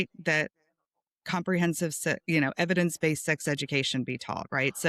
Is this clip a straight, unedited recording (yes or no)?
yes